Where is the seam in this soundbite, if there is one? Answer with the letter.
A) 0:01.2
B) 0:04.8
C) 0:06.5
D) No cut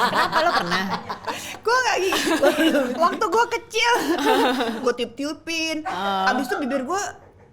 B